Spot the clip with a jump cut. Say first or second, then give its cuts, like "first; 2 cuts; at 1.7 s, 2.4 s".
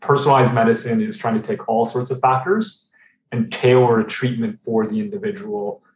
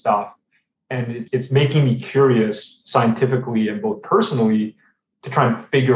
second; 1 cut; at 1.2 s